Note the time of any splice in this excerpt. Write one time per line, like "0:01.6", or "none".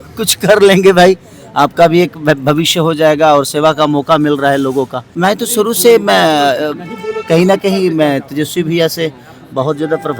0:05.0